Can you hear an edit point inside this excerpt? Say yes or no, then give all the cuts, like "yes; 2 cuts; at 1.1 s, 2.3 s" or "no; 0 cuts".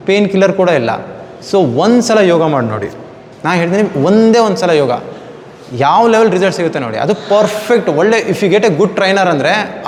no; 0 cuts